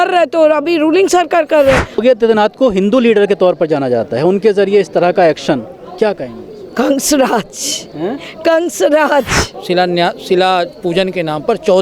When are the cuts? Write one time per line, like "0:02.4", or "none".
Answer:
0:02.0
0:09.5